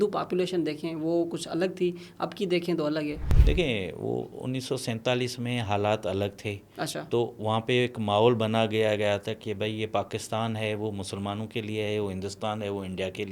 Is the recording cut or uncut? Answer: cut